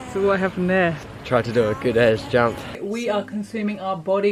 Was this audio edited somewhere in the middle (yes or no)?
yes